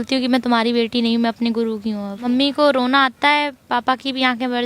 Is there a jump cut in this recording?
yes; 1 cut; at 2.2 s

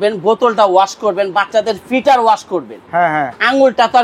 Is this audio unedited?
yes; 0 cuts

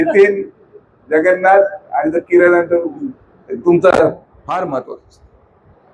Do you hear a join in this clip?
yes; 1 cut; at 4.3 s

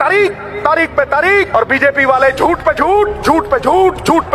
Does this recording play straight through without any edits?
no; 1 cut; at 1.5 s

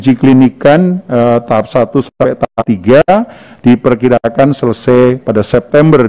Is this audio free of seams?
yes; 0 cuts

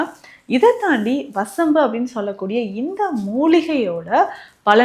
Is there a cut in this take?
no; 0 cuts

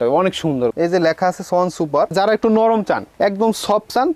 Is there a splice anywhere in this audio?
yes; 2 cuts; at 0.7 s, 2.1 s

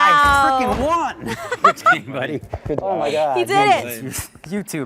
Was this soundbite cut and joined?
no; 0 cuts

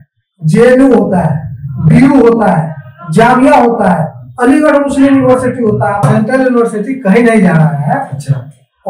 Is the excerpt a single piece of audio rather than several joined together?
no; 1 cut; at 6.0 s

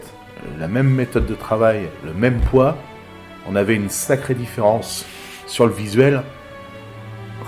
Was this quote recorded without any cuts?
yes; 0 cuts

